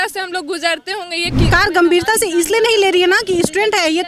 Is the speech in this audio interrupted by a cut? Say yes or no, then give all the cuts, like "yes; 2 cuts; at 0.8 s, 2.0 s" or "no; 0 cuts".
yes; 1 cut; at 1.5 s